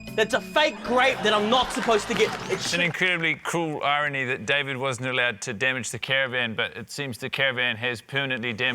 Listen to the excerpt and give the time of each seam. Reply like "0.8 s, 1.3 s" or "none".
2.7 s